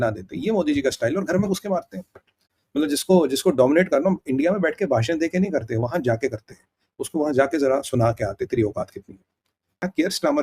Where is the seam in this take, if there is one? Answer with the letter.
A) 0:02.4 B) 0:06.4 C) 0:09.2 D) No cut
D